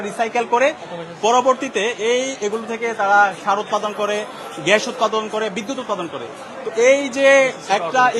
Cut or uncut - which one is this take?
uncut